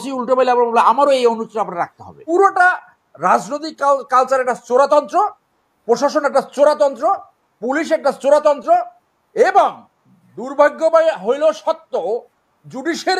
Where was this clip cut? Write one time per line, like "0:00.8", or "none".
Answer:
0:02.2